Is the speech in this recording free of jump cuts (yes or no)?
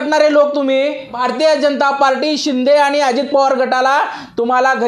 no